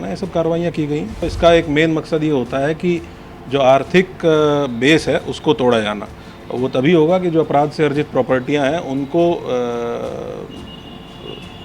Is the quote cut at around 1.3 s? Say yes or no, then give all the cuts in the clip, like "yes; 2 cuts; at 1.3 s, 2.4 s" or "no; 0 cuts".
yes; 1 cut; at 1.3 s